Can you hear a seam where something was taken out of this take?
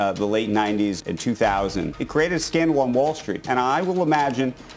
yes; 3 cuts; at 1.0 s, 2.0 s, 3.4 s

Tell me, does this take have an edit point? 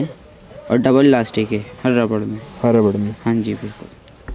no; 0 cuts

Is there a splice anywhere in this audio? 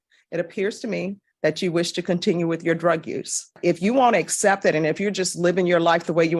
yes; 1 cut; at 3.6 s

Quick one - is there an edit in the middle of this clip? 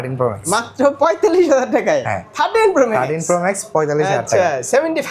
no; 0 cuts

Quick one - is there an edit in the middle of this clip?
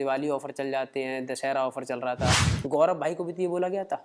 yes; 1 cut; at 2.5 s

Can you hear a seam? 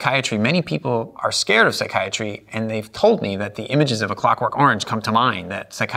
yes; 1 cut; at 1.1 s

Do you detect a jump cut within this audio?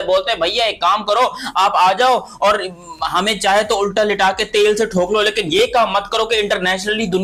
no; 0 cuts

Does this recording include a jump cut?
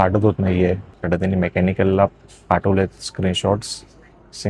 yes; 1 cut; at 0.9 s

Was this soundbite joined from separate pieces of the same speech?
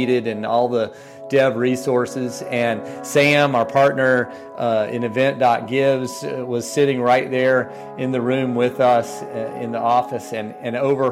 no; 0 cuts

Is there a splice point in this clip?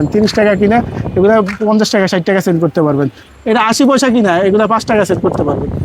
yes; 1 cut; at 3.2 s

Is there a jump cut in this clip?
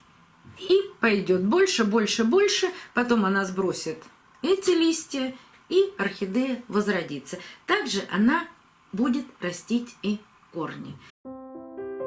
yes; 1 cut; at 11.1 s

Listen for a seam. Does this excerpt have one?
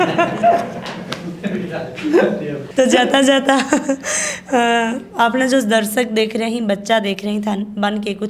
no; 0 cuts

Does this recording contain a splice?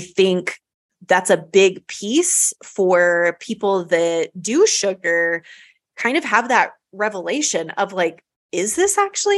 no; 0 cuts

